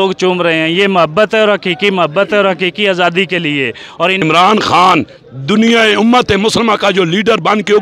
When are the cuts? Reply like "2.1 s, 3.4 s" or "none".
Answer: 4.2 s